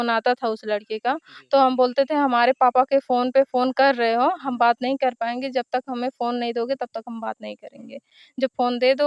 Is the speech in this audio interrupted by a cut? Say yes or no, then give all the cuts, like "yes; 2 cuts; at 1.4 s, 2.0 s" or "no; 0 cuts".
no; 0 cuts